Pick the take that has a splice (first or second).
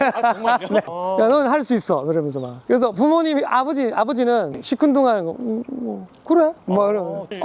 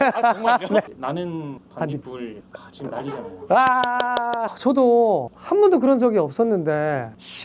second